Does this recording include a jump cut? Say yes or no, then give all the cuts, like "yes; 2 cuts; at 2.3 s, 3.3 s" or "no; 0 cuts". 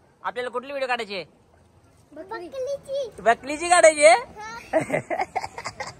no; 0 cuts